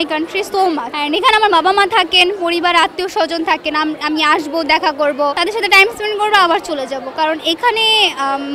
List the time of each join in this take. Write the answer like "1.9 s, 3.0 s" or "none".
0.9 s, 5.4 s